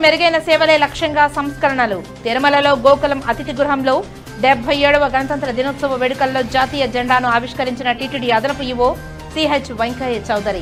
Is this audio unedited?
yes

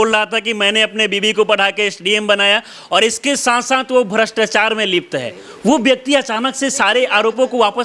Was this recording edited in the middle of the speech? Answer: no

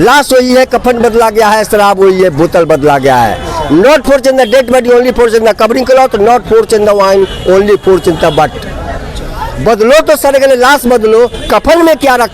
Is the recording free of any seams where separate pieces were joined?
yes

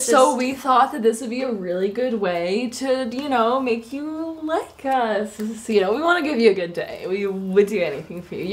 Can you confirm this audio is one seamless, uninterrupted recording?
no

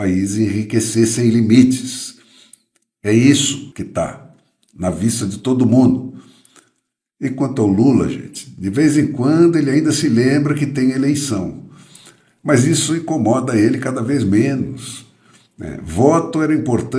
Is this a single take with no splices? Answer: no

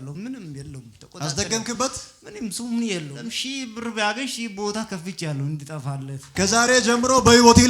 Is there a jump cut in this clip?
yes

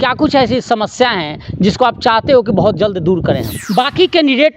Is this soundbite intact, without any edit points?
no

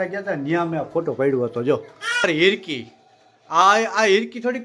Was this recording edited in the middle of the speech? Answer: no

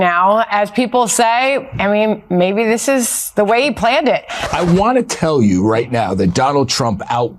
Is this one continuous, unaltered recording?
no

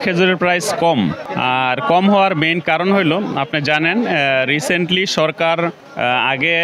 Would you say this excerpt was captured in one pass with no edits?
yes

